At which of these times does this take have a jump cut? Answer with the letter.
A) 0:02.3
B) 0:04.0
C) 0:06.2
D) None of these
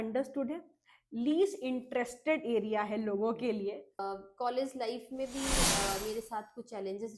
B